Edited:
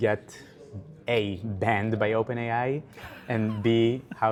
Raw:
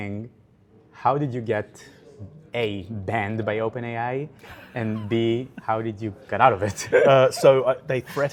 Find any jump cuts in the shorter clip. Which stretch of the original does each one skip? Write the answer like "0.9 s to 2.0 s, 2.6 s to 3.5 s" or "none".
none

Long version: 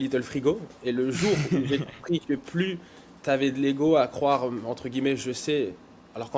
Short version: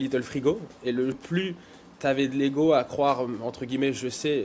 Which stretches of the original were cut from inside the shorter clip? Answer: 1.2 s to 2.4 s

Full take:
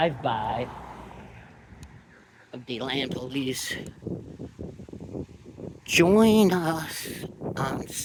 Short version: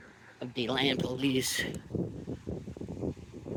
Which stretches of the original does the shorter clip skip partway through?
none

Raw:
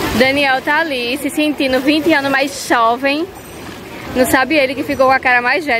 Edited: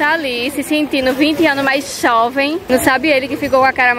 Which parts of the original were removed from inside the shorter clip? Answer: 3.3 s to 4.1 s

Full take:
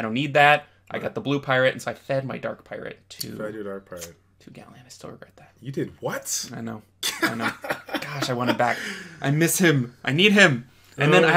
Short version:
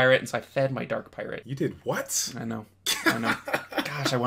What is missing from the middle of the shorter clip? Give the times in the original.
3.0 s to 5.6 s

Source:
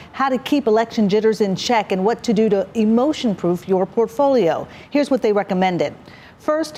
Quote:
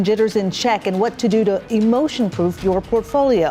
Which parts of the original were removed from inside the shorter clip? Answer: none

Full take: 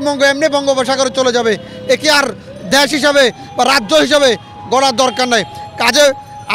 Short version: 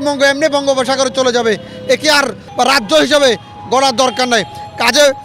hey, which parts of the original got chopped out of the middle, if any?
2.4 s to 3.4 s

